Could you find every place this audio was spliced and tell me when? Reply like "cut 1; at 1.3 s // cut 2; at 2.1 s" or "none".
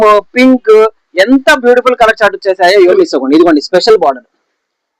cut 1; at 2.9 s